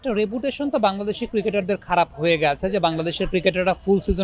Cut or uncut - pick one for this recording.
uncut